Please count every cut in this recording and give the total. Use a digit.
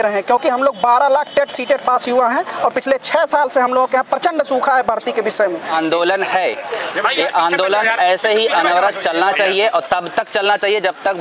1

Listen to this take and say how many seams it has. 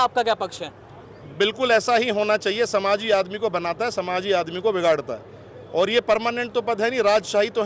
0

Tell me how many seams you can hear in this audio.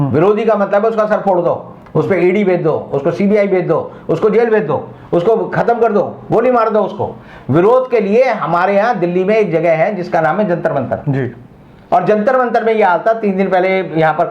0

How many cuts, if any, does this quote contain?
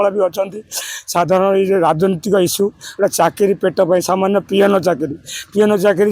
0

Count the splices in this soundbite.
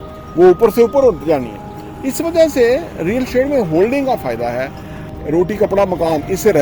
1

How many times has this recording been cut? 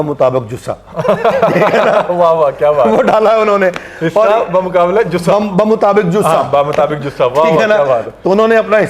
0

